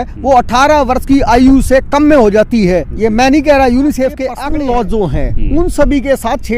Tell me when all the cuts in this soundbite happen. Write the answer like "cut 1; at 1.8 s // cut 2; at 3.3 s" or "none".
cut 1; at 4.3 s